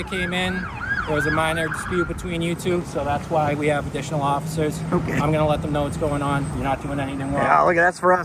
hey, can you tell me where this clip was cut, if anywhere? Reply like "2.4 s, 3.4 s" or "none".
none